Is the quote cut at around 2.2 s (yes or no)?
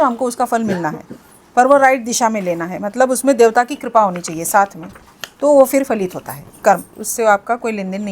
no